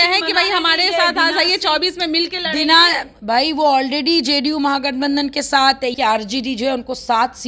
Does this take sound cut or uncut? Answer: cut